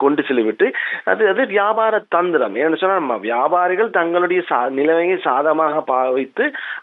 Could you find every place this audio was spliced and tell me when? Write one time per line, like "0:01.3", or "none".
none